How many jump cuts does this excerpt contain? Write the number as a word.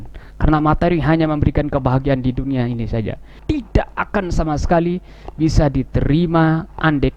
one